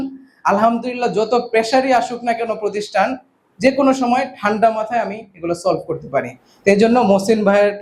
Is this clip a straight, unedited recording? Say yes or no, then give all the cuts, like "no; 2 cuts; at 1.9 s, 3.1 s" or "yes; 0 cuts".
yes; 0 cuts